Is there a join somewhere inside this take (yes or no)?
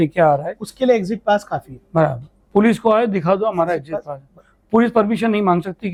no